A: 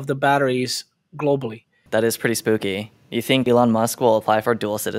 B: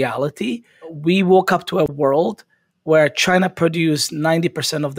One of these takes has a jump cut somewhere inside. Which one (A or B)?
A